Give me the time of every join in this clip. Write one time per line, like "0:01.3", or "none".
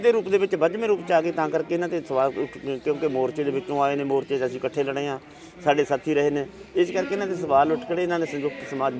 none